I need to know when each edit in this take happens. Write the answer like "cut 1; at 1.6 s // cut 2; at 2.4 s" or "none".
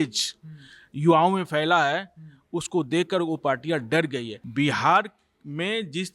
cut 1; at 4.4 s